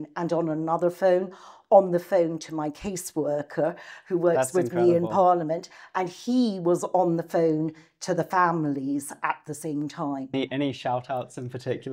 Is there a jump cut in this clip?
yes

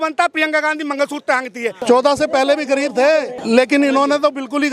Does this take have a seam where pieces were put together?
yes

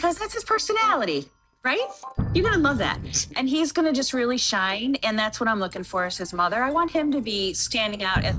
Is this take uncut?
yes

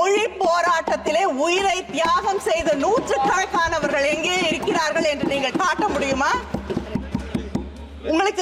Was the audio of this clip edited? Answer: no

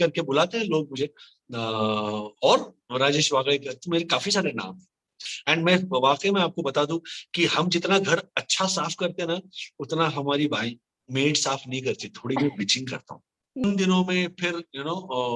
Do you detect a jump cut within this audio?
yes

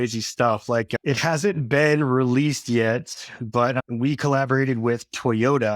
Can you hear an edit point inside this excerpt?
yes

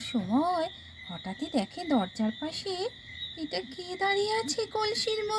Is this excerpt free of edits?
yes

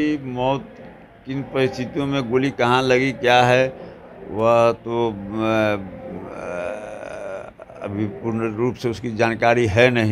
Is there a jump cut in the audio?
no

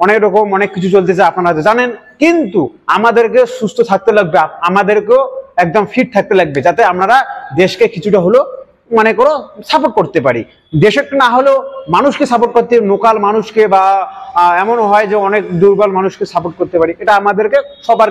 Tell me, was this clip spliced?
no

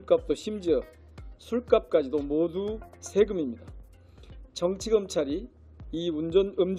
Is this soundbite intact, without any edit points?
yes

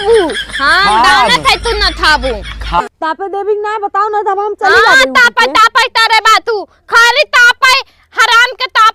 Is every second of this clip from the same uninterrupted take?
no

